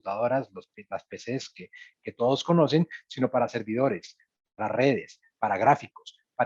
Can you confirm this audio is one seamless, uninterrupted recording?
yes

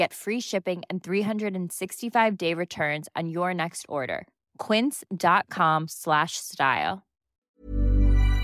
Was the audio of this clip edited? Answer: yes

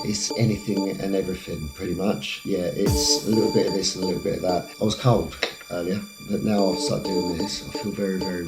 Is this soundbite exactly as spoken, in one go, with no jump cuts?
no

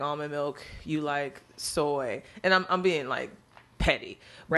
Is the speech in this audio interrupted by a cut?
no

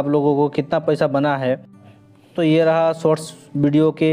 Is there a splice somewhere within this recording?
yes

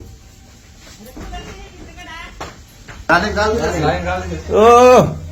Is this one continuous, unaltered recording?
yes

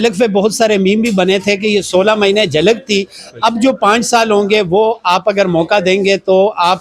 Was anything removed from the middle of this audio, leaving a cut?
no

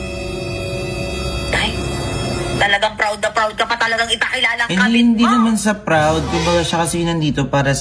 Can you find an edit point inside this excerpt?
no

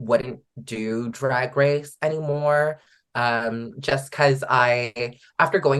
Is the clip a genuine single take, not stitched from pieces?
yes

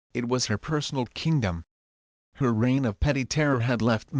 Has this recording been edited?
yes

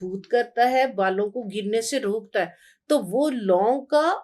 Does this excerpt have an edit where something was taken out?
no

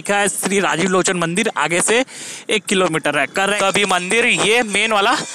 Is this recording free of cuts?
no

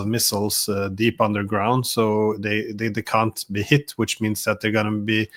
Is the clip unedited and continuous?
yes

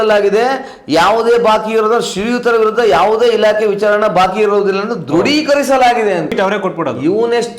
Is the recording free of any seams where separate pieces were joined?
no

